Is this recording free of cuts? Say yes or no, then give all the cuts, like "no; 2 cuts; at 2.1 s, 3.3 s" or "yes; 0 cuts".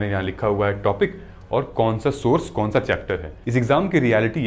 no; 1 cut; at 3.3 s